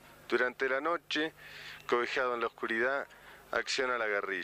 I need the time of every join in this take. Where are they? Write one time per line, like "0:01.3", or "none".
0:01.8